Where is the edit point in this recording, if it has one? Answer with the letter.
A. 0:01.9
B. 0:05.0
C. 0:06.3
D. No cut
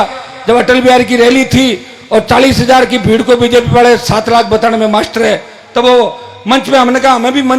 D